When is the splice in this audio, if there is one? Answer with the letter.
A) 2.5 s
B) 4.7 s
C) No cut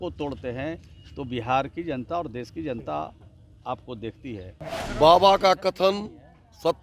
B